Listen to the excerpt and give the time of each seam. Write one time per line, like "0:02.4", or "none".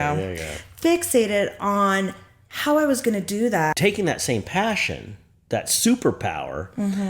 0:03.8